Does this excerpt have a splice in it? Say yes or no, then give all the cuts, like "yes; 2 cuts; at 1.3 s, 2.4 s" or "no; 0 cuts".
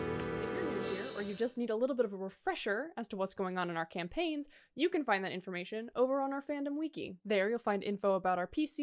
yes; 1 cut; at 1.1 s